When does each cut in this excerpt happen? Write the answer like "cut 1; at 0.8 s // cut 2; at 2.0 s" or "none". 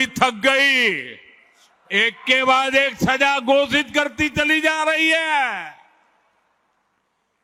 none